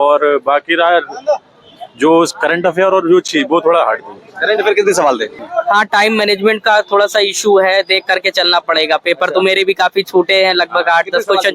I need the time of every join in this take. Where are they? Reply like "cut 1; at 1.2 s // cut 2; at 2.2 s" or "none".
cut 1; at 5.4 s